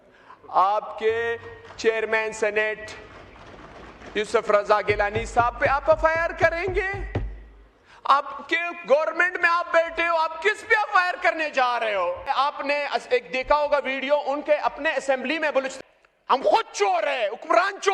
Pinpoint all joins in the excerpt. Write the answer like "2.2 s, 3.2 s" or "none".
12.3 s, 15.7 s